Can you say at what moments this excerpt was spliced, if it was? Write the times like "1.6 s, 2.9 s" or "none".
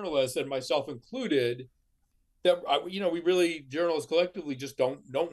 1.9 s